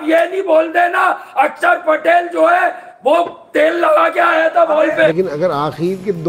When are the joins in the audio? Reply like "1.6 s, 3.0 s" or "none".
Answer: 5.1 s